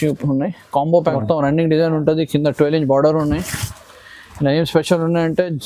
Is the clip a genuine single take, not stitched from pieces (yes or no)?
no